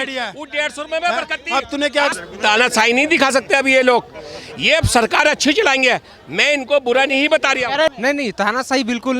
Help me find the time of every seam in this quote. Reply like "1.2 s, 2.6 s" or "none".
2.1 s, 7.9 s